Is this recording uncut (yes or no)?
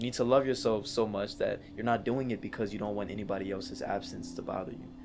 yes